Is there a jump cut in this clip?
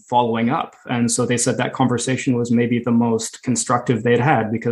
no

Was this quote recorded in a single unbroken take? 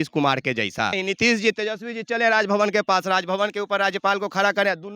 no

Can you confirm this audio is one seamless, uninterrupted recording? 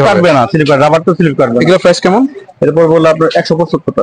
yes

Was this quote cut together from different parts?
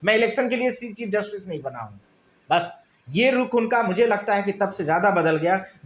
no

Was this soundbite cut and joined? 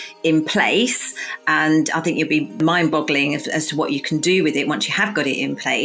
yes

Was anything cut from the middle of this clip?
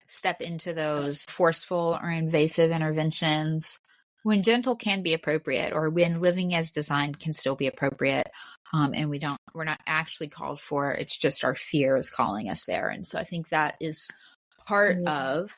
yes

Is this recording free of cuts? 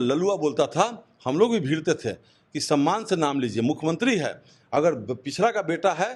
yes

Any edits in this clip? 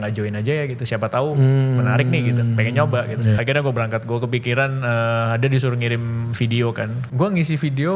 yes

